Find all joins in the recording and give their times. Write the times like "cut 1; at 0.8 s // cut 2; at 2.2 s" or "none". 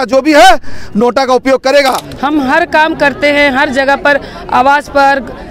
cut 1; at 2.1 s